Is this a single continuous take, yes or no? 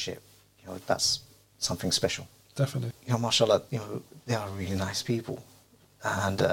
no